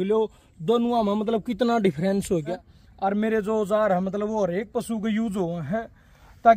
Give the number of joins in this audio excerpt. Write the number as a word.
one